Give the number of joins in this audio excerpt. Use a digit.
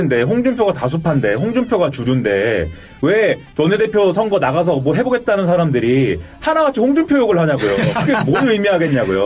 0